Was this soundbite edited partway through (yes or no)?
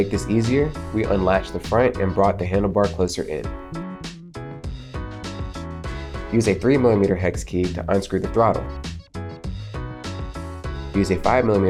no